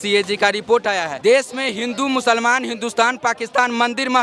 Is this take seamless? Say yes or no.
no